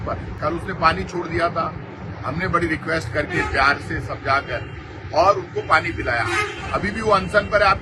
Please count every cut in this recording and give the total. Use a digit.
0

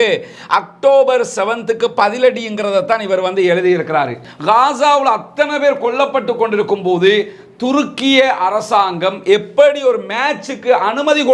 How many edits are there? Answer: 1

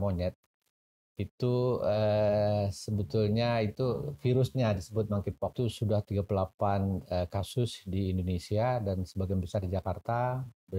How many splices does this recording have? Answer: 1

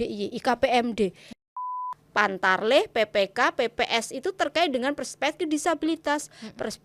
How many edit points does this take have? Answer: 1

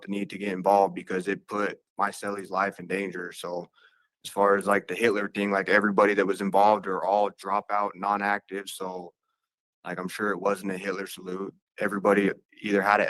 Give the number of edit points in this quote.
1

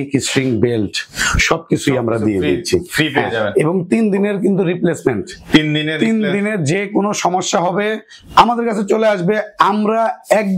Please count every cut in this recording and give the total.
0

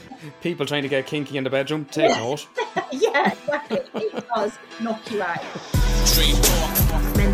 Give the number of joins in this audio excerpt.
1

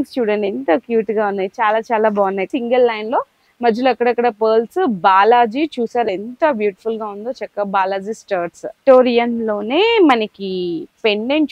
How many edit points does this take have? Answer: 2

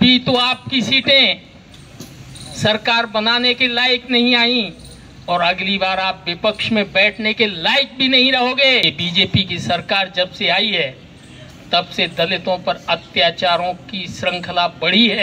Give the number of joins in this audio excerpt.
1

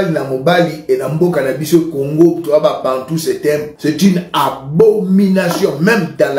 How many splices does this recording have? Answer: 1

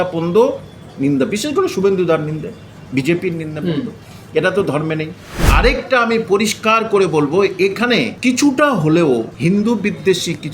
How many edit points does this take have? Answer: 3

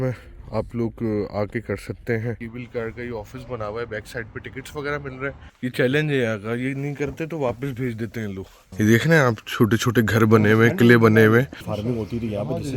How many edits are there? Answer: 4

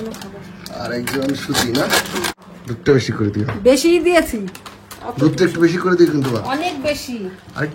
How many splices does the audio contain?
1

